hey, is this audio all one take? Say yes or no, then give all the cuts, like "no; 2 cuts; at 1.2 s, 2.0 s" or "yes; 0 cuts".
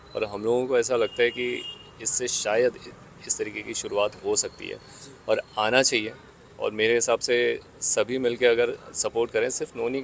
yes; 0 cuts